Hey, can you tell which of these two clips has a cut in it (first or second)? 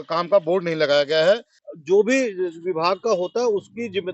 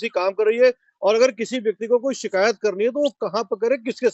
first